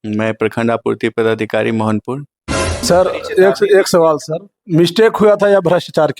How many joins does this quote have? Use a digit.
1